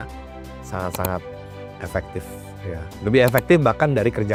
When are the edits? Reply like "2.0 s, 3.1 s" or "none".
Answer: none